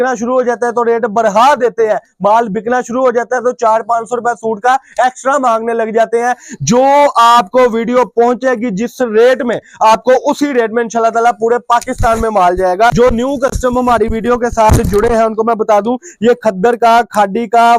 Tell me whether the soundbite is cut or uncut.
cut